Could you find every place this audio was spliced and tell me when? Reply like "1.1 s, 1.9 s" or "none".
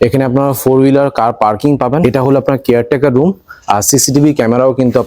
2.0 s